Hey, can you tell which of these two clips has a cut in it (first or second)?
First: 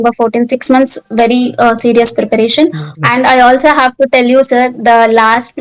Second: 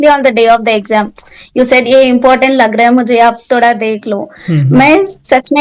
first